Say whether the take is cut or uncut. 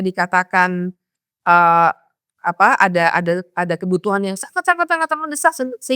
uncut